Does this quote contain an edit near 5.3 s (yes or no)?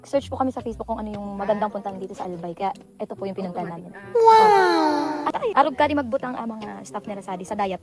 yes